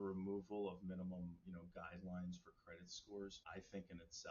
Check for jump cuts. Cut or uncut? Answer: cut